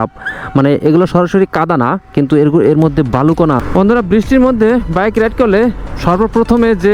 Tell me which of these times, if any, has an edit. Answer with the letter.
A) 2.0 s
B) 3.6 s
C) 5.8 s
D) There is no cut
B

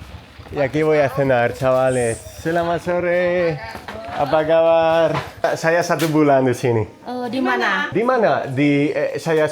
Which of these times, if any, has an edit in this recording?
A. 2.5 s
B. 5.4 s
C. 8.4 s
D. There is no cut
B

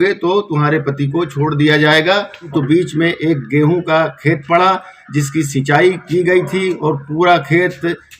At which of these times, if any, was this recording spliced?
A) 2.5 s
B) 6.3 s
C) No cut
A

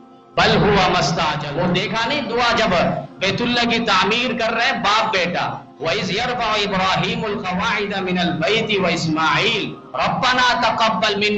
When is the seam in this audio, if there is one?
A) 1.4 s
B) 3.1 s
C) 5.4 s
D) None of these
A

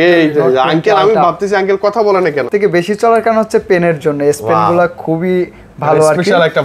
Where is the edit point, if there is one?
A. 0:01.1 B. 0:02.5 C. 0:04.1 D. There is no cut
B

